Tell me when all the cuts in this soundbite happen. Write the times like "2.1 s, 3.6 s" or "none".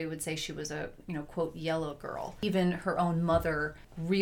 2.5 s